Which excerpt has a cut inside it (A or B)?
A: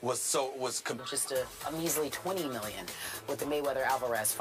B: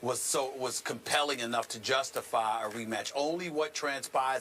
B